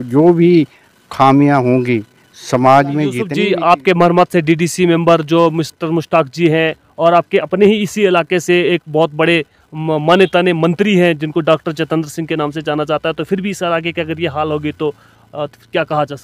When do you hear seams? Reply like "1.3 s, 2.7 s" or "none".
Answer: 3.3 s

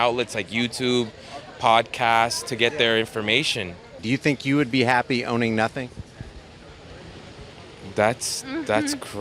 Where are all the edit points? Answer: 3.9 s

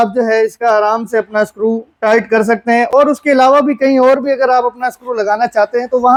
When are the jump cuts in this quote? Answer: none

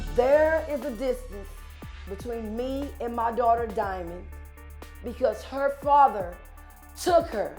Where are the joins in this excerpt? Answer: none

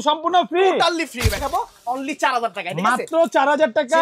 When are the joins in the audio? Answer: 1.4 s

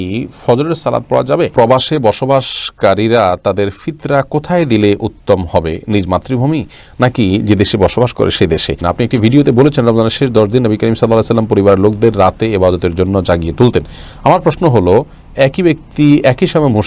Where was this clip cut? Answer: 1.5 s, 8.8 s

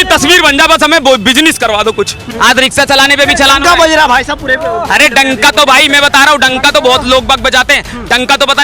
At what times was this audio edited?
2.3 s

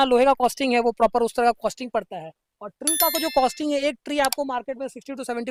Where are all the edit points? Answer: none

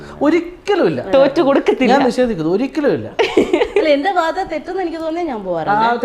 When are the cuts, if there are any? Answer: none

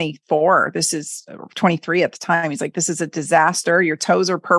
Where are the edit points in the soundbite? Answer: none

